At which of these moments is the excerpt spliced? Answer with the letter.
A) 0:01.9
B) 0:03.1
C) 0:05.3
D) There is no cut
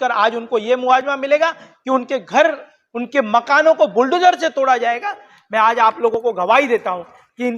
C